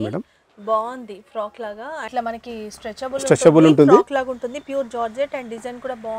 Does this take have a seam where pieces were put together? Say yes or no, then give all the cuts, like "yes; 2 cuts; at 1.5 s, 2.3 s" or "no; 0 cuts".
yes; 1 cut; at 2.1 s